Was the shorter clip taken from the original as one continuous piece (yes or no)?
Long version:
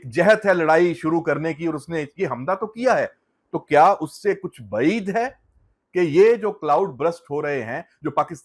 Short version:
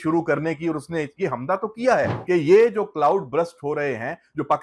no